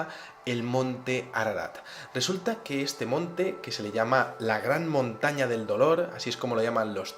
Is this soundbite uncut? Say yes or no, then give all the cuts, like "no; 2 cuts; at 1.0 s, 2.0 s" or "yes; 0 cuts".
no; 1 cut; at 4.3 s